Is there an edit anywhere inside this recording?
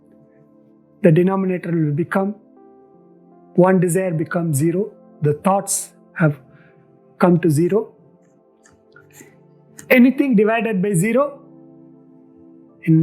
yes; 1 cut; at 1.0 s

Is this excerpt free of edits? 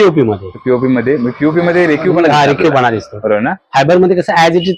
yes; 0 cuts

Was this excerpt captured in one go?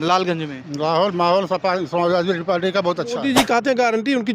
no; 1 cut; at 3.2 s

